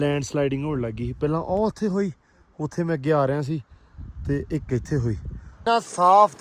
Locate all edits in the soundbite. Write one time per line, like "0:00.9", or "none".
0:05.5